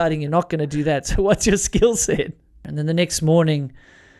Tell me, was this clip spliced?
yes; 1 cut; at 2.7 s

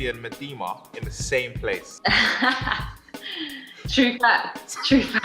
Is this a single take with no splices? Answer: yes; 0 cuts

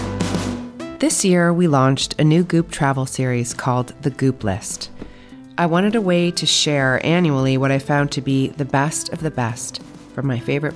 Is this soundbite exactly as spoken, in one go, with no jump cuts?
no; 1 cut; at 0.9 s

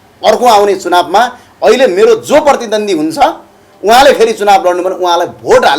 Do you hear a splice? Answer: no; 0 cuts

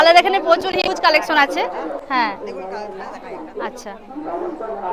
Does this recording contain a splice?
no; 0 cuts

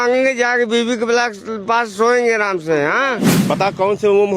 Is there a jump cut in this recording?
yes; 1 cut; at 3.3 s

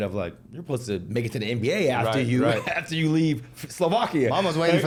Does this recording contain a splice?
no; 0 cuts

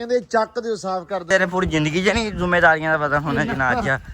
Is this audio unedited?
no; 1 cut; at 1.2 s

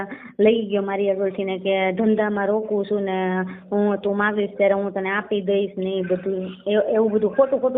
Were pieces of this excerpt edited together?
no; 0 cuts

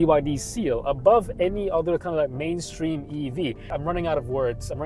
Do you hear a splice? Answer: yes; 1 cut; at 3.7 s

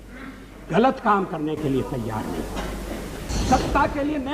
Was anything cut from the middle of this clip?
yes; 1 cut; at 3.3 s

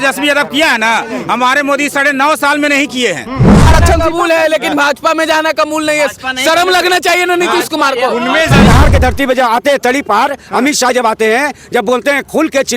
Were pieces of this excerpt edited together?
yes; 2 cuts; at 3.7 s, 8.7 s

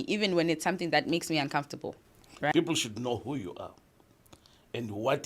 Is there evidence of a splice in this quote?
yes; 1 cut; at 2.5 s

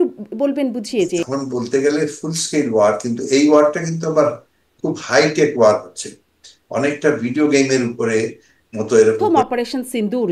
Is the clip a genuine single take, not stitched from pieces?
no; 2 cuts; at 1.3 s, 9.2 s

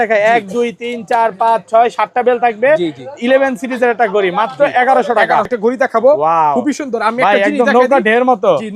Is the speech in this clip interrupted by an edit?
yes; 1 cut; at 5.5 s

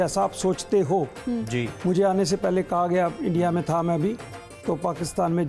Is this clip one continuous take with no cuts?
yes; 0 cuts

